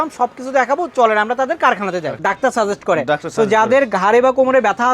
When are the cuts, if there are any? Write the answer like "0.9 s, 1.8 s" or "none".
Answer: 2.2 s